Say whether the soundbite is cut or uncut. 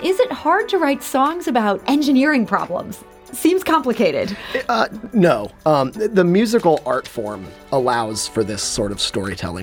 uncut